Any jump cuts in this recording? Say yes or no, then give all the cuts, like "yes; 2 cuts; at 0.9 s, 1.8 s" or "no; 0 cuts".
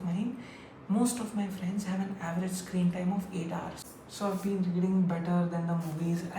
yes; 1 cut; at 3.8 s